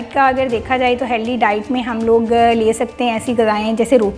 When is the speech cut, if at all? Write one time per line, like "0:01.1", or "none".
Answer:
none